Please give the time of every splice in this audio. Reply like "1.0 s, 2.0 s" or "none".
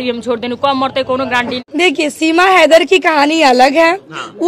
1.6 s